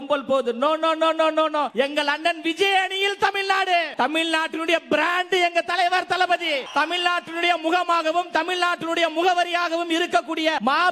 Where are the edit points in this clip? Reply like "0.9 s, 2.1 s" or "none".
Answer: 3.9 s